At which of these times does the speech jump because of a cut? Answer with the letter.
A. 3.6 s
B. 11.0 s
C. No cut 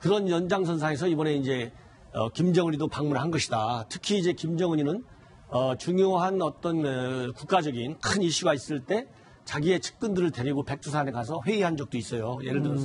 A